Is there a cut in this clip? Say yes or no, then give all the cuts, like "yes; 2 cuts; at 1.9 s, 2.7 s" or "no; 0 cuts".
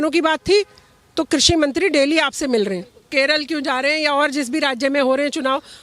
yes; 1 cut; at 3.0 s